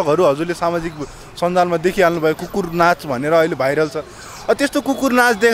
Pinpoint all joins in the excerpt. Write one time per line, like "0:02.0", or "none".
none